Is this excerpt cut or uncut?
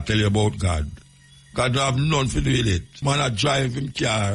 cut